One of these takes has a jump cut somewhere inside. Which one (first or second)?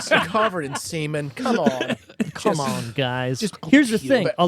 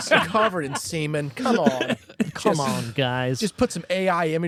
first